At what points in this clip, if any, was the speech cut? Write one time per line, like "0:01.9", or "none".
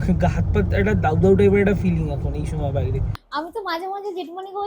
0:03.1